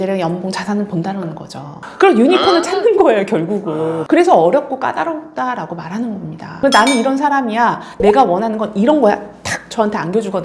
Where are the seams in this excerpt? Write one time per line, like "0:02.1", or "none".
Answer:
0:06.5